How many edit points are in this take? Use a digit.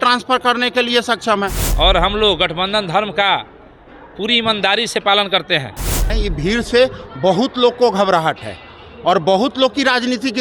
2